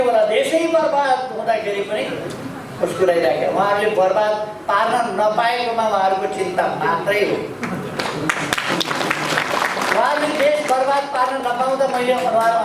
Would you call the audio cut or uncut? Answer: uncut